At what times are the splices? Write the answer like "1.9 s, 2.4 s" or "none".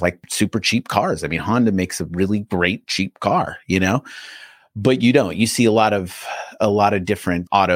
none